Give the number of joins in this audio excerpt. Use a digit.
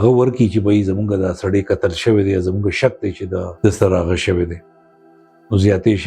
1